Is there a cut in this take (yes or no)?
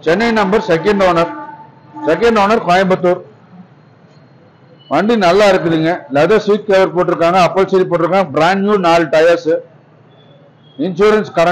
no